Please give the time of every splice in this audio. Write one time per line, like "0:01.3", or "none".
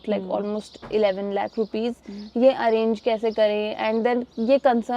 none